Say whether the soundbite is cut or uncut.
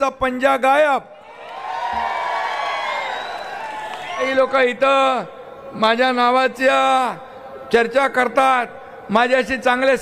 cut